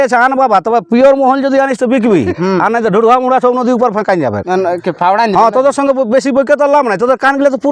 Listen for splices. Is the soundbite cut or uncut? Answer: uncut